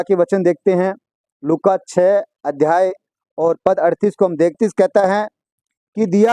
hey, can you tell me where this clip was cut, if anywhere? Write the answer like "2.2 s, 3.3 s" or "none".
4.6 s